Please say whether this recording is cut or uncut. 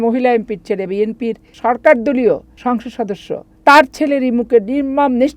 cut